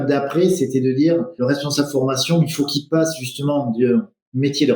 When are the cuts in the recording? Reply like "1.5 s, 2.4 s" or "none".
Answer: 1.3 s